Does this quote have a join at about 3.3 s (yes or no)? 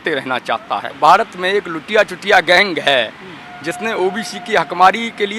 no